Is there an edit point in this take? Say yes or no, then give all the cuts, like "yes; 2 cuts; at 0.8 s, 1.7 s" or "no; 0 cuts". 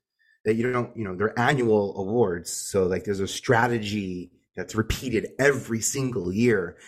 no; 0 cuts